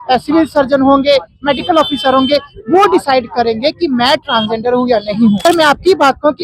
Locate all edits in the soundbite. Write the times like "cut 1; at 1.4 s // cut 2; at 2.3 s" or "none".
cut 1; at 5.4 s

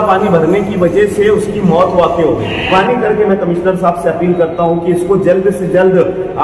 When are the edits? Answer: cut 1; at 2.7 s

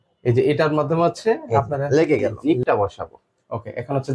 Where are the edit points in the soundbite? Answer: cut 1; at 2.4 s

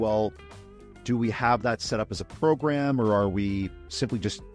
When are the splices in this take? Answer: none

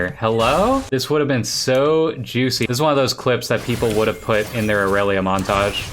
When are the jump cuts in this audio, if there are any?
cut 1; at 0.9 s // cut 2; at 2.7 s

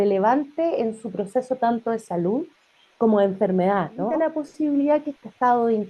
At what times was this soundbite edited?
cut 1; at 4.2 s

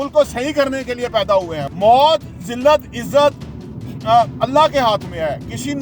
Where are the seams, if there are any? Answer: cut 1; at 1.6 s

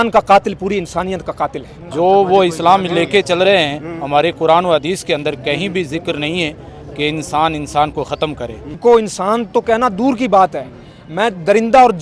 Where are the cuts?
cut 1; at 1.8 s // cut 2; at 8.7 s

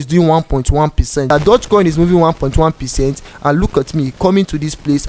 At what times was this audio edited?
cut 1; at 1.3 s

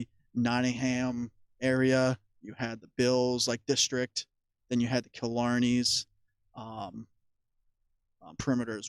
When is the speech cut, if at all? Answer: cut 1; at 2.3 s

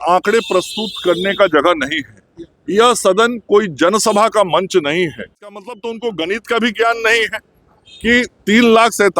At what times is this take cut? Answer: cut 1; at 5.6 s

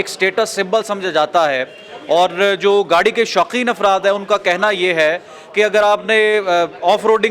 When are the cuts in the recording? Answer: none

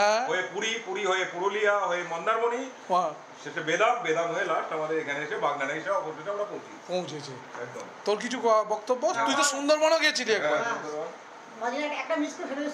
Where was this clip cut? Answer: none

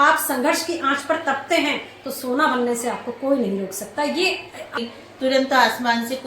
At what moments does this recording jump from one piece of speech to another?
cut 1; at 4.8 s

